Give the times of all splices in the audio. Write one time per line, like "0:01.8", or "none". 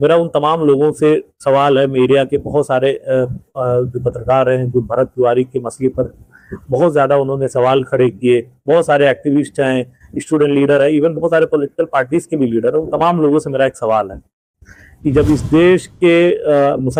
none